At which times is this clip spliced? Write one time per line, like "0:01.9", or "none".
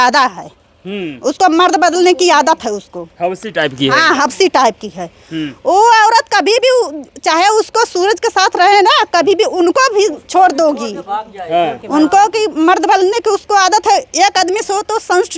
none